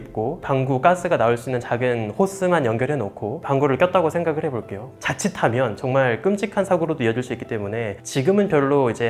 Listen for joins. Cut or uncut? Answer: cut